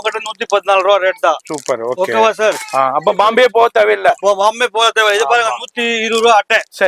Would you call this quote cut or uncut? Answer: uncut